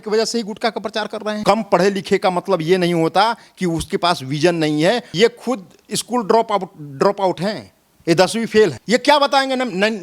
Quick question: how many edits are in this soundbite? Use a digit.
3